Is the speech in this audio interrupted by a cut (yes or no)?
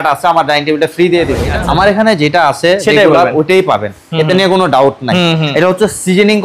yes